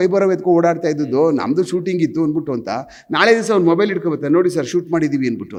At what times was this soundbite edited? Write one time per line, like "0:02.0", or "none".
none